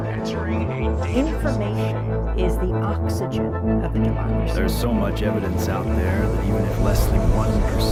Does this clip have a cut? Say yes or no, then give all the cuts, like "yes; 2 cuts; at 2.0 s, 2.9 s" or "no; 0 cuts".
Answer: no; 0 cuts